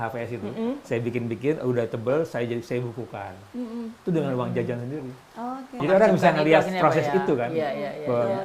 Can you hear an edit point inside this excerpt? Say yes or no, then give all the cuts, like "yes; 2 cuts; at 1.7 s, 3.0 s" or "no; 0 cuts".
yes; 1 cut; at 5.8 s